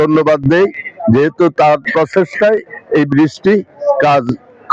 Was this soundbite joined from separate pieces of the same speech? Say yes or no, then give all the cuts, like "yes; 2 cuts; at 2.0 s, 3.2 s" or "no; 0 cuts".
no; 0 cuts